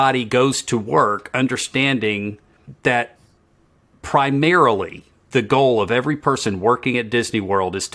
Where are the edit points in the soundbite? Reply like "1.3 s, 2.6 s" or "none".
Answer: 2.6 s